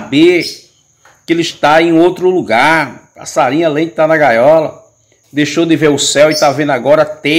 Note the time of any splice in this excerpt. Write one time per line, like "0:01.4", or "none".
none

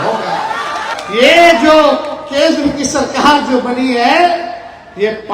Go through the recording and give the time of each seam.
0:00.9

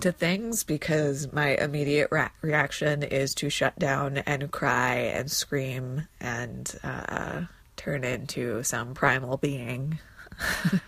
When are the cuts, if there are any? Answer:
0:07.6

